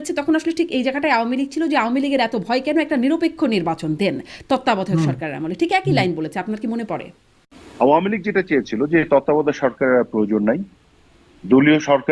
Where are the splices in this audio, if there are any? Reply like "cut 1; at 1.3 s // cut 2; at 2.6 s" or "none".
cut 1; at 7.6 s